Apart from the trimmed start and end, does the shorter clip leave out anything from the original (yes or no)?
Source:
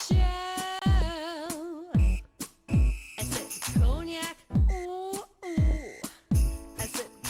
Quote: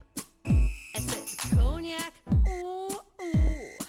no